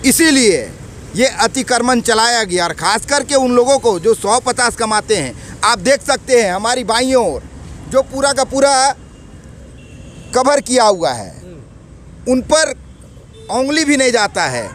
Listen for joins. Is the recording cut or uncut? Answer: uncut